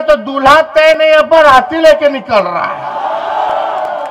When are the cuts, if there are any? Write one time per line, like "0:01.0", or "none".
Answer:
none